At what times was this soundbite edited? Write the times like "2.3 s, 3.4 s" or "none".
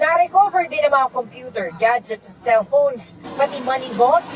1.0 s